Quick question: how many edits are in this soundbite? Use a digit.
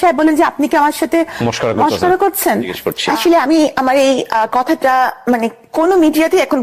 1